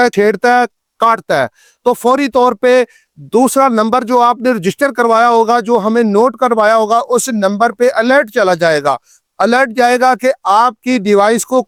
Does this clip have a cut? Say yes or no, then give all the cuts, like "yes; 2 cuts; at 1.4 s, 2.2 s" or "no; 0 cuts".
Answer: no; 0 cuts